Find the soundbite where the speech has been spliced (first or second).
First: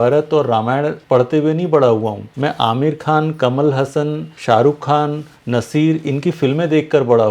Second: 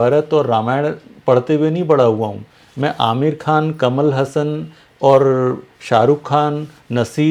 first